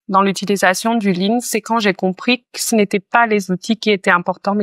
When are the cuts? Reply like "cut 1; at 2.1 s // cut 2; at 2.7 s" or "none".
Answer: none

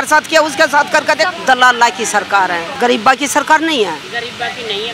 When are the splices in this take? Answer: cut 1; at 1.3 s // cut 2; at 2.7 s

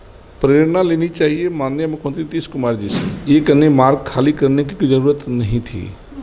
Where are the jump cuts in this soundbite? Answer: cut 1; at 3.1 s

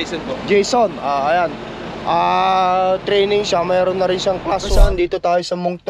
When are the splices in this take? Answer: cut 1; at 4.8 s

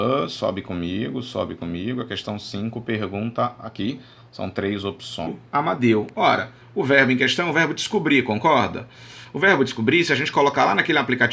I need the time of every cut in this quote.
none

